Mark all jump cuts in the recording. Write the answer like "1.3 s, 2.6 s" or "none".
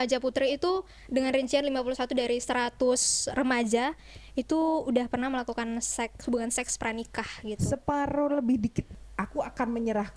8.9 s